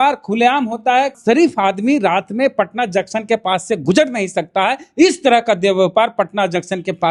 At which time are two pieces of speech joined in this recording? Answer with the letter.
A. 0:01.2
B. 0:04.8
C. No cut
A